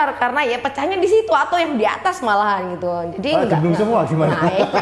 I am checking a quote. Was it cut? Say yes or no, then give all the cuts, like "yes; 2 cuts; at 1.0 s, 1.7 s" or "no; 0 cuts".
no; 0 cuts